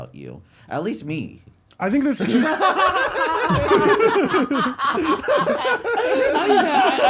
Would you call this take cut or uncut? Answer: uncut